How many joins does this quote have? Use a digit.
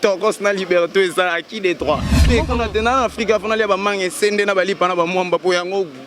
1